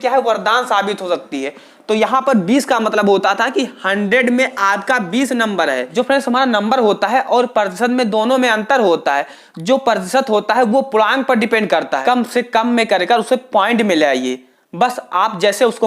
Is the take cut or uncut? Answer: cut